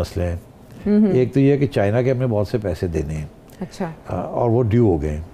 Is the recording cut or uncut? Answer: uncut